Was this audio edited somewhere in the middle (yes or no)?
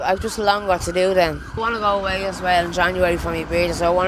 yes